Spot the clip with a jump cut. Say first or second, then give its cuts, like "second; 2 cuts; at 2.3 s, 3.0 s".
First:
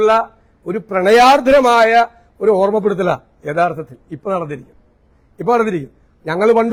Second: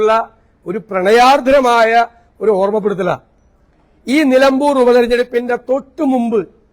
second; 1 cut; at 3.3 s